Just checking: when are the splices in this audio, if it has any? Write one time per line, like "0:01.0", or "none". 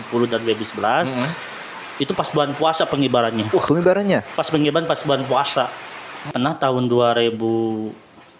0:06.3